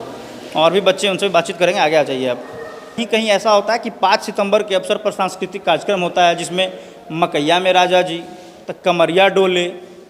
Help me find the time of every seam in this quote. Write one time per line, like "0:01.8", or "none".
0:03.0